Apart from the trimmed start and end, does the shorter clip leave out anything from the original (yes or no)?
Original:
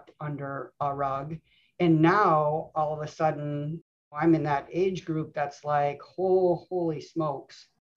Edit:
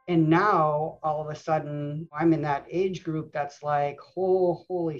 yes